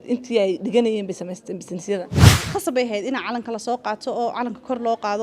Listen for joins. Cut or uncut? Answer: cut